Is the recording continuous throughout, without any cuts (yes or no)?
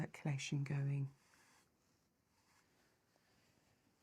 no